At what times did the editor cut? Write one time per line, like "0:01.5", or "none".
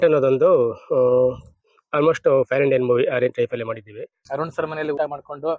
0:04.3